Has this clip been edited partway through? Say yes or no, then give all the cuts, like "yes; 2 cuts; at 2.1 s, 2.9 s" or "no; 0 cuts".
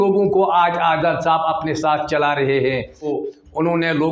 yes; 1 cut; at 3.1 s